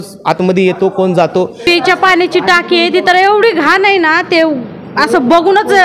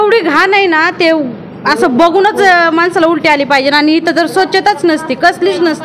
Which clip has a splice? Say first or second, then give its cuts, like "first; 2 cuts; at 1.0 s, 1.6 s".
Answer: first; 1 cut; at 1.6 s